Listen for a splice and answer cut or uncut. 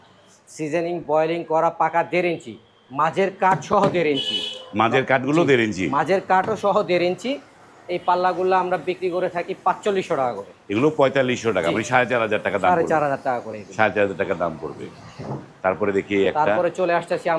uncut